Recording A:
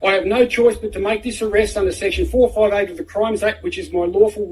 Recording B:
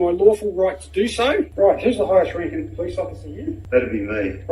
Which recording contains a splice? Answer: B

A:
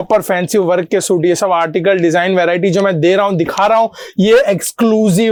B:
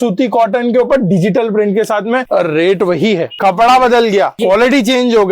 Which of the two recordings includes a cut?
B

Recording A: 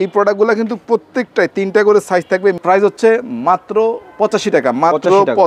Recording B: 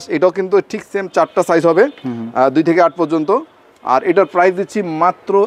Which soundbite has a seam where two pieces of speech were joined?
A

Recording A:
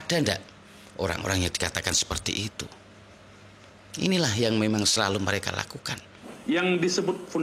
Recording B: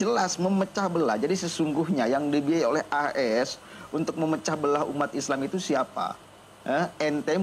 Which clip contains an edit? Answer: A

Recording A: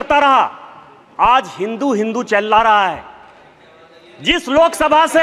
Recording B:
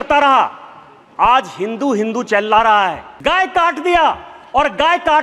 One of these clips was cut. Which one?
B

